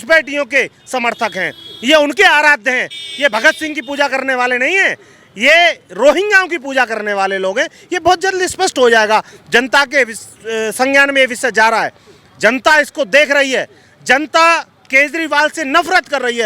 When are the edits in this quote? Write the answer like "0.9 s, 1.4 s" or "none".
none